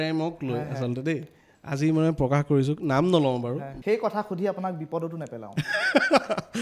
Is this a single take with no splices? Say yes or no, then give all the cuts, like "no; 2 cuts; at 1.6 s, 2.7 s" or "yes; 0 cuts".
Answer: no; 1 cut; at 3.7 s